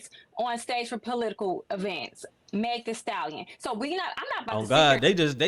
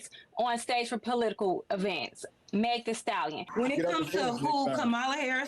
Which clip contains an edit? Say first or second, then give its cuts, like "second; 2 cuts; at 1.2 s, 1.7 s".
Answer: second; 1 cut; at 3.4 s